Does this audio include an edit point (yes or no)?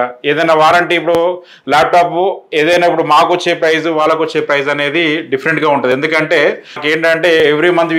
yes